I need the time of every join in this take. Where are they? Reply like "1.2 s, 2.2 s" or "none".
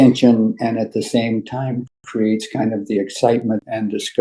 none